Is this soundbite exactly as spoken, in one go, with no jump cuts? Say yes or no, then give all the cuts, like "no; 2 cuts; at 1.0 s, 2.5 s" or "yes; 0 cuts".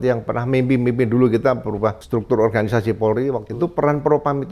no; 2 cuts; at 2.0 s, 3.5 s